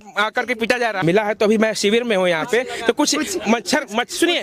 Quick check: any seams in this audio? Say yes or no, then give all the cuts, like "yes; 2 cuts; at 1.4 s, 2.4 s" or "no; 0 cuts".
yes; 1 cut; at 1.0 s